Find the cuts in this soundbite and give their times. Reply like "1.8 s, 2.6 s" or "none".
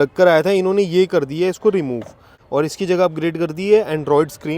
2.4 s